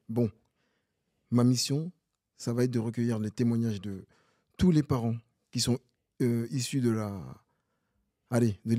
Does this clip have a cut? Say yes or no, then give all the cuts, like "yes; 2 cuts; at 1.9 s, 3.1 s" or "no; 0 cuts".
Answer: no; 0 cuts